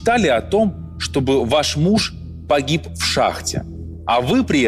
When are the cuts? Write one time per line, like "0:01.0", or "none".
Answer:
none